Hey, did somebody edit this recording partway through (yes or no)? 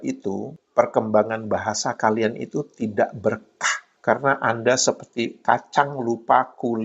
yes